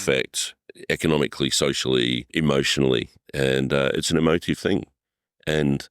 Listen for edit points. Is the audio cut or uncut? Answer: cut